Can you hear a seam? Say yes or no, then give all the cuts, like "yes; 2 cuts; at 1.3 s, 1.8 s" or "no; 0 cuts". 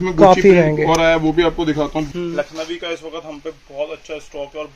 yes; 1 cut; at 2.1 s